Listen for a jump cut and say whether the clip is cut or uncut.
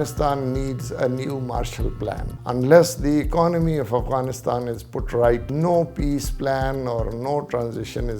cut